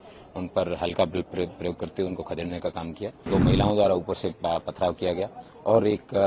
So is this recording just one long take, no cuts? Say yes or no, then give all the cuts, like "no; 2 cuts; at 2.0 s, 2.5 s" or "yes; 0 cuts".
no; 1 cut; at 3.3 s